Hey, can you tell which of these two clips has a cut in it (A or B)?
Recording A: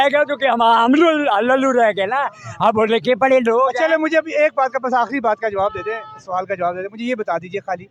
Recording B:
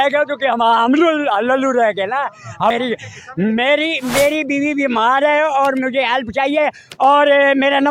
B